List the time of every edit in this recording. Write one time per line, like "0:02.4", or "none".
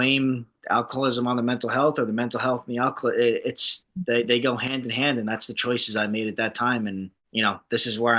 0:07.2